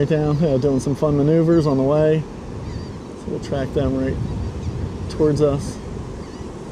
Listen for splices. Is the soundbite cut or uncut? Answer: uncut